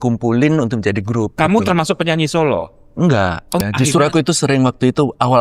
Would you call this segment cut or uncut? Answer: cut